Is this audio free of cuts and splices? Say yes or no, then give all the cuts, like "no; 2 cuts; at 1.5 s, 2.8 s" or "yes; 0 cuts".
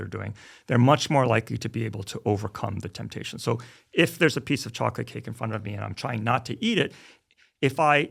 yes; 0 cuts